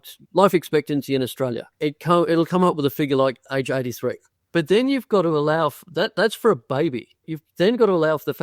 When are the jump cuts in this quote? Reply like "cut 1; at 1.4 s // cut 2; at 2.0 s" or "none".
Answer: cut 1; at 1.7 s // cut 2; at 4.3 s // cut 3; at 7.4 s